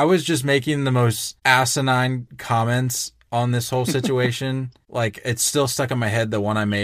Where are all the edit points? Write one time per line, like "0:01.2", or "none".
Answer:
0:01.3
0:02.3
0:04.8